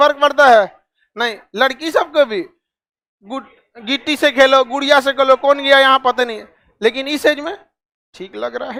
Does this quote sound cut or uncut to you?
uncut